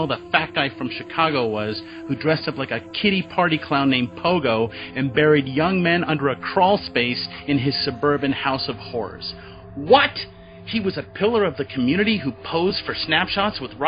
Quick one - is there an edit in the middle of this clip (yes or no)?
no